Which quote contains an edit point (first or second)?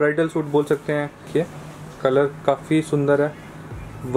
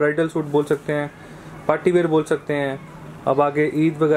first